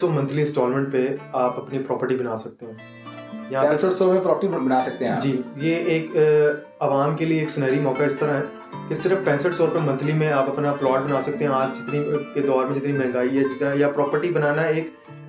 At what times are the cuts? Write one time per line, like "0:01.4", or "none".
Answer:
none